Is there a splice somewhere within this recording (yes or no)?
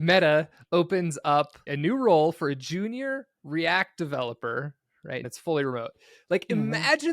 yes